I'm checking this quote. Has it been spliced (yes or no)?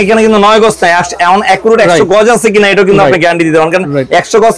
no